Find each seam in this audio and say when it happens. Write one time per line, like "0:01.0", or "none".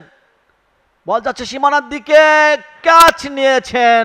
none